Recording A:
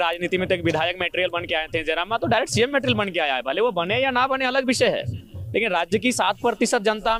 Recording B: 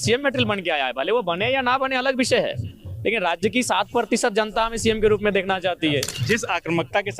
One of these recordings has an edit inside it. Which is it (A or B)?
B